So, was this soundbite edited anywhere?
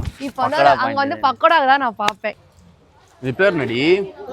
yes; 1 cut; at 2.4 s

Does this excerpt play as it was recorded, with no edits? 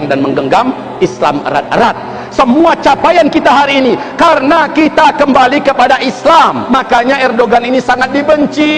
no; 1 cut; at 6.6 s

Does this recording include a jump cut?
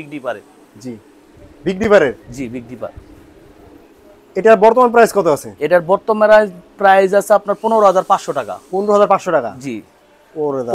no; 0 cuts

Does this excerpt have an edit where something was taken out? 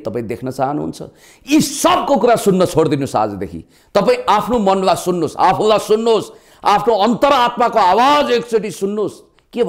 no; 0 cuts

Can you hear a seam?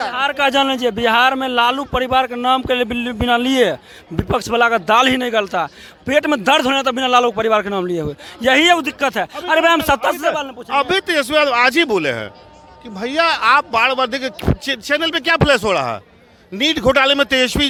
no; 0 cuts

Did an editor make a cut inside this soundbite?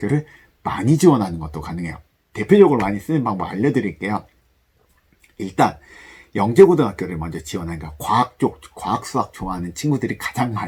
no; 0 cuts

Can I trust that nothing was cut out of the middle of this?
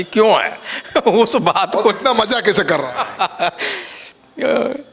yes; 0 cuts

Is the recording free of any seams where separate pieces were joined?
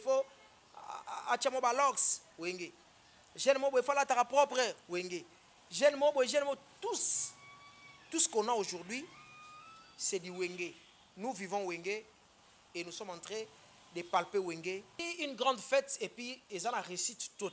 no; 1 cut; at 15.1 s

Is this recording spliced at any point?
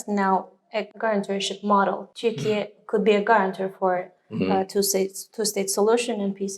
yes; 2 cuts; at 0.9 s, 2.1 s

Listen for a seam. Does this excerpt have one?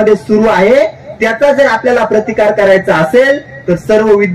no; 0 cuts

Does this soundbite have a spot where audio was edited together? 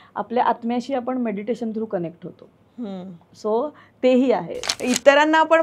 yes; 1 cut; at 4.7 s

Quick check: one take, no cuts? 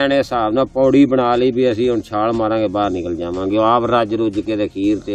yes; 0 cuts

